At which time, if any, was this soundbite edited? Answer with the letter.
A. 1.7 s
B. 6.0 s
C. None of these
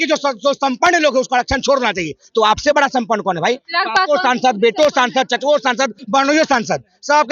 B